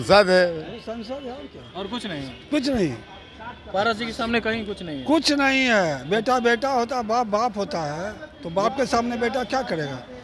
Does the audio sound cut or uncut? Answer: uncut